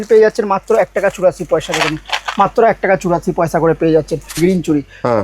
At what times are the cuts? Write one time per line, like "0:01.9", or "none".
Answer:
0:04.3